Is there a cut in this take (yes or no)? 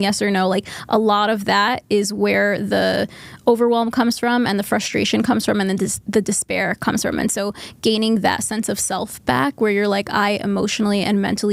no